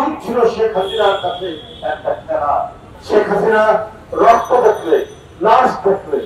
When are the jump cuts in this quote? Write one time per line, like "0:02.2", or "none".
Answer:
0:02.9